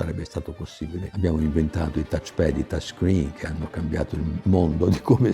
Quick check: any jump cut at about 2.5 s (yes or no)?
no